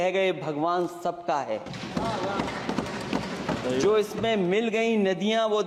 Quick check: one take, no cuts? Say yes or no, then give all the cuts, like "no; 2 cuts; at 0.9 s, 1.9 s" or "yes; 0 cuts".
yes; 0 cuts